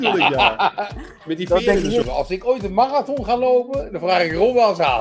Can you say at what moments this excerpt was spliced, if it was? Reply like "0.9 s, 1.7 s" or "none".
2.0 s